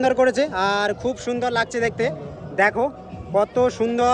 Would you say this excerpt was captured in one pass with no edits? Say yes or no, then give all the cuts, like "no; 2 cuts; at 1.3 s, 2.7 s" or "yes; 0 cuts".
yes; 0 cuts